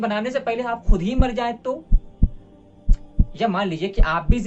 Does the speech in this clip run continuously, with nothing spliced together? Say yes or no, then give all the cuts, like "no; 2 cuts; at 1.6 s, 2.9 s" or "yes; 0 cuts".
yes; 0 cuts